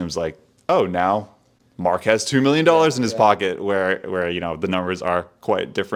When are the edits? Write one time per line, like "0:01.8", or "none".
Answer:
none